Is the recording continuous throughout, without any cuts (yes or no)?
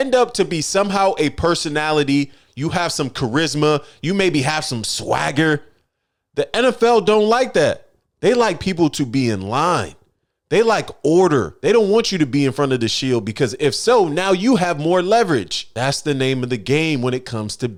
yes